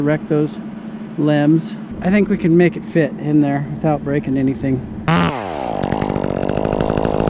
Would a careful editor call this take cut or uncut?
cut